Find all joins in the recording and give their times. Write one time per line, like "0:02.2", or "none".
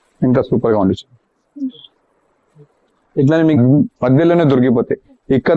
0:03.6